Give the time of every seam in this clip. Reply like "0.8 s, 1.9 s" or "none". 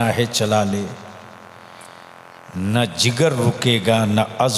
none